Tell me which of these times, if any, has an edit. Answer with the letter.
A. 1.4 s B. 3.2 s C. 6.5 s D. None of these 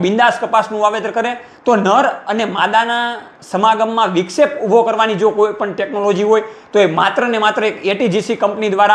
A